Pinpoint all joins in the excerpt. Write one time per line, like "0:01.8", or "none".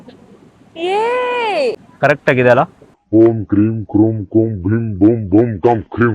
0:01.9